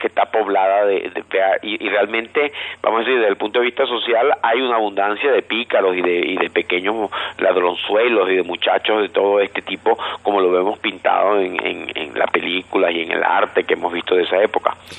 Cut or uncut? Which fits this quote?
cut